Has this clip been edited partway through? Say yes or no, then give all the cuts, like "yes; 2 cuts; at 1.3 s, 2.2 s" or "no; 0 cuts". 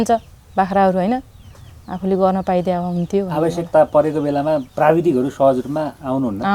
yes; 1 cut; at 4.7 s